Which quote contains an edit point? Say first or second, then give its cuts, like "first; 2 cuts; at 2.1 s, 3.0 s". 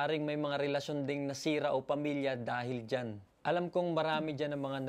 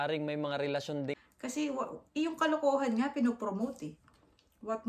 second; 1 cut; at 1.2 s